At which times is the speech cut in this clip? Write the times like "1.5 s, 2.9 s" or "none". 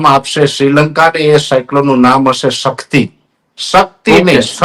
none